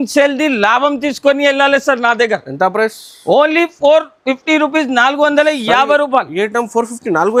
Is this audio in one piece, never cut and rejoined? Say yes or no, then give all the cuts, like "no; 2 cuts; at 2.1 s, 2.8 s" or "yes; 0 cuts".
yes; 0 cuts